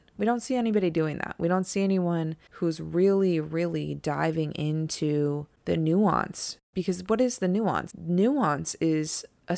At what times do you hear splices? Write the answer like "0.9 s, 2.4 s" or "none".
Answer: 2.4 s, 5.5 s, 6.7 s, 7.9 s